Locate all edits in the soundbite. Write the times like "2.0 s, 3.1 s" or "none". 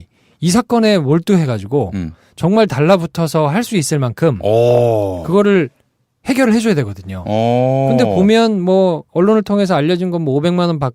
6.6 s